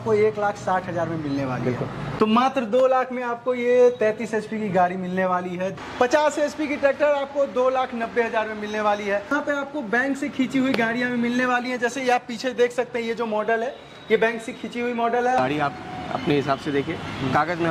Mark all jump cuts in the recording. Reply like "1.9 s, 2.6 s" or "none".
2.1 s, 5.8 s, 9.3 s, 15.4 s